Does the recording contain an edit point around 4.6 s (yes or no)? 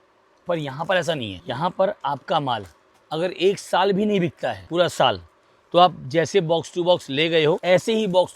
yes